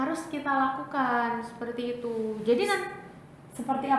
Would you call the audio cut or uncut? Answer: uncut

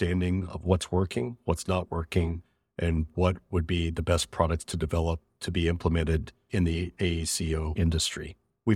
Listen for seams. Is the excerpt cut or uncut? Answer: cut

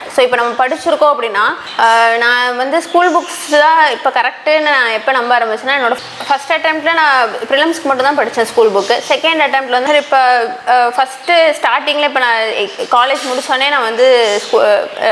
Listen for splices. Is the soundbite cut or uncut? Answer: cut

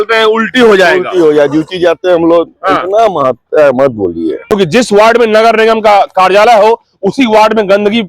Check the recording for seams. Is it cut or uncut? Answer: cut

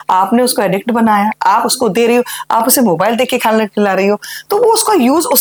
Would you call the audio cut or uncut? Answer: uncut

